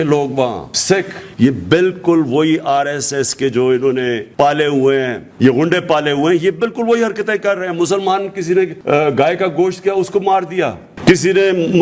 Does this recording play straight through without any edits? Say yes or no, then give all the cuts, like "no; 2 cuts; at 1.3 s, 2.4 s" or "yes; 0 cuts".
no; 4 cuts; at 1.2 s, 4.2 s, 5.2 s, 8.8 s